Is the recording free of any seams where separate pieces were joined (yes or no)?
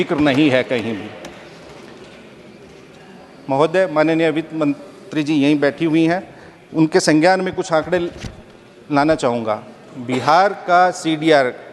yes